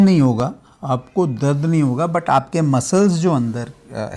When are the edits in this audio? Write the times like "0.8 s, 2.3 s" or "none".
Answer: none

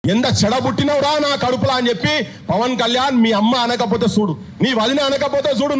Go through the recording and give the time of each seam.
none

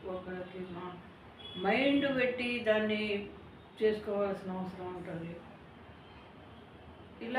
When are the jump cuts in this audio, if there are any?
none

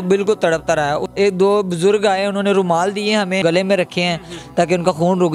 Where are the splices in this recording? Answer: 1.1 s, 3.4 s

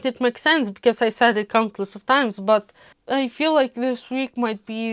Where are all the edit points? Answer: 2.9 s

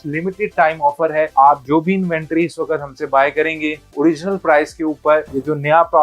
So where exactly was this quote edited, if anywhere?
1.3 s

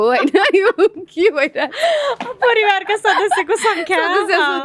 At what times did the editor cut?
none

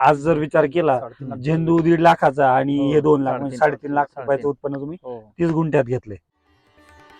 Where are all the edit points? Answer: 6.1 s

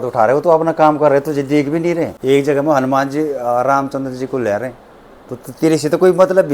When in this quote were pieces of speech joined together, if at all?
2.2 s

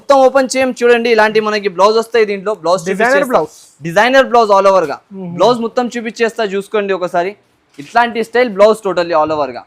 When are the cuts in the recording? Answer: none

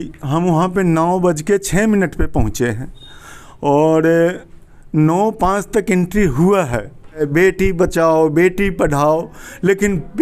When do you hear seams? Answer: 7.2 s

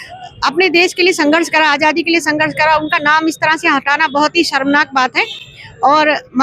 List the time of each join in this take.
none

